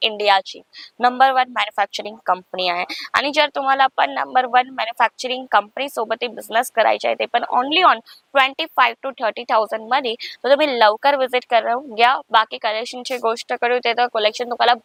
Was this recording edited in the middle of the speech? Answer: no; 0 cuts

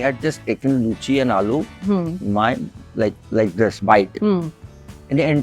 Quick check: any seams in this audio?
no; 0 cuts

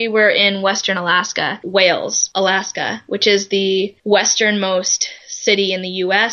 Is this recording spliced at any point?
yes; 3 cuts; at 1.6 s, 2.2 s, 4.0 s

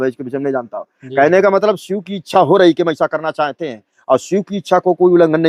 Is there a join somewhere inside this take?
no; 0 cuts

